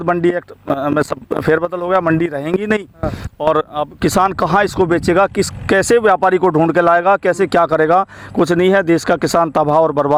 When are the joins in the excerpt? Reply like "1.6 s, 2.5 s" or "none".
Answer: none